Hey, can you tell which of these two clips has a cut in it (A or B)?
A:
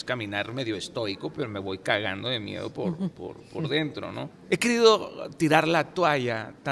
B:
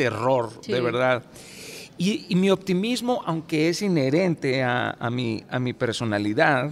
A